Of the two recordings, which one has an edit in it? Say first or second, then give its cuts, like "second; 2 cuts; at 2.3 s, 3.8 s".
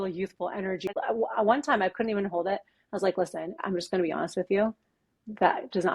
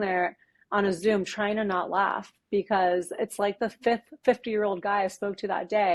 first; 2 cuts; at 0.9 s, 3.6 s